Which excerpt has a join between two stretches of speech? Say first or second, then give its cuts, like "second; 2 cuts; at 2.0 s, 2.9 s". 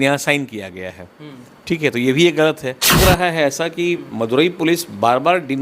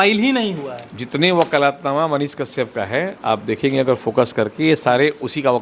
first; 1 cut; at 3.0 s